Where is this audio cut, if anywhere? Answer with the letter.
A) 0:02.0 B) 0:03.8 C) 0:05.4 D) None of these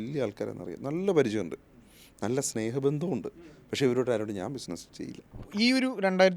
C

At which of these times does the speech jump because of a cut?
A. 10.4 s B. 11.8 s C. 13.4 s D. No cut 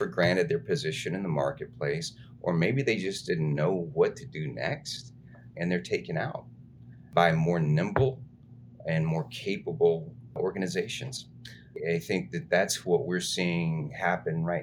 A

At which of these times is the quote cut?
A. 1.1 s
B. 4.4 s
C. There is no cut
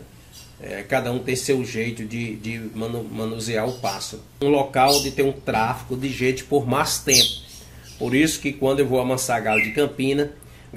B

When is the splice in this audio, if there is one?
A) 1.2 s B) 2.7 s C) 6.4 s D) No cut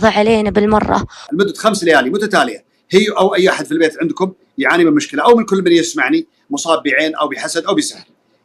A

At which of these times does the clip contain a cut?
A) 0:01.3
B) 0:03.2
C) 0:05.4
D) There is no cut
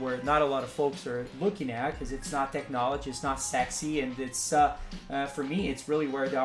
A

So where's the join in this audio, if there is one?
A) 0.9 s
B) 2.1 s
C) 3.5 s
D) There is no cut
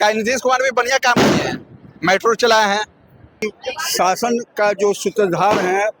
C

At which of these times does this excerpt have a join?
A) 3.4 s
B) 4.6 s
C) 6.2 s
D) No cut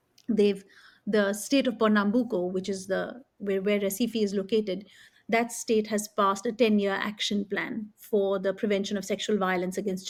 D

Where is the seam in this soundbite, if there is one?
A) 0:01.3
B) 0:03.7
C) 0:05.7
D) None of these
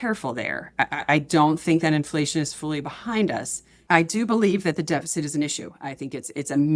B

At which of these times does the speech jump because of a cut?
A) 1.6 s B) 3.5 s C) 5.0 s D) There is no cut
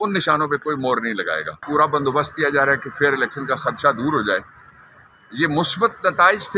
A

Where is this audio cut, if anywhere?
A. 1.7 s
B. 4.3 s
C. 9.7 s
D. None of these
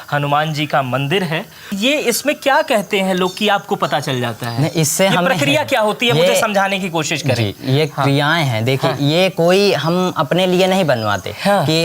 A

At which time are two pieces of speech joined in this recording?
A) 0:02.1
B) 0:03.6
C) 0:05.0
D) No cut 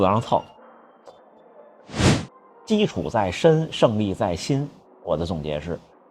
A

